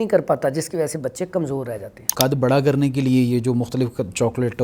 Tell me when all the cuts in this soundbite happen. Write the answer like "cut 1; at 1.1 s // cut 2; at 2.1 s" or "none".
cut 1; at 2.0 s